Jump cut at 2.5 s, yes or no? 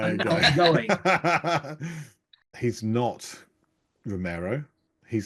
yes